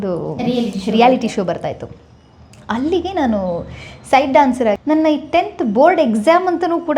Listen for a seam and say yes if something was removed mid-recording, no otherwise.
yes